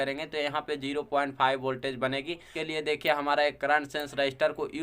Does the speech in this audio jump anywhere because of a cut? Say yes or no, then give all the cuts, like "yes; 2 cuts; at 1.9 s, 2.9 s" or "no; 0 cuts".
yes; 1 cut; at 2.5 s